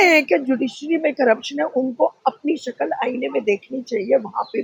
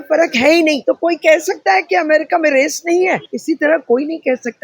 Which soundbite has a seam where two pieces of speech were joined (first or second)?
second